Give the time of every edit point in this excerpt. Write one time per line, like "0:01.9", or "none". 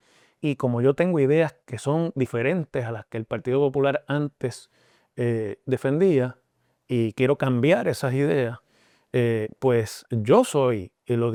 none